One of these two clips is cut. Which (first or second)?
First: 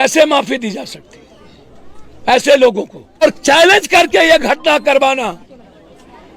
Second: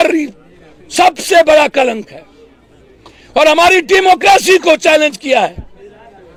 first